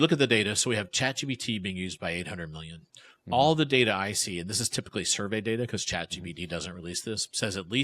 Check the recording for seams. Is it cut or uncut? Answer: uncut